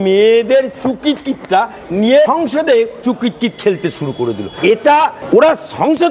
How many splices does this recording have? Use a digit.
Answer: 3